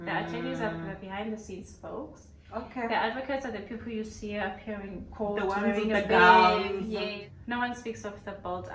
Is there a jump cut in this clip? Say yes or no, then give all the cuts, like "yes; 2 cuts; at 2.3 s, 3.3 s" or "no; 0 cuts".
yes; 1 cut; at 7.1 s